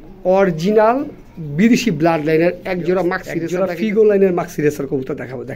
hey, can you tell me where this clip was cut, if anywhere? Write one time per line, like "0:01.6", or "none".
0:03.4